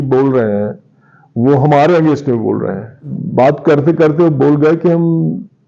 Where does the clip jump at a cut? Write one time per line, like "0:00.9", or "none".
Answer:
0:03.1